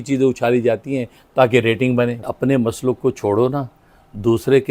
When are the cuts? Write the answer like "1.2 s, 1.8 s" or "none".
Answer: 2.3 s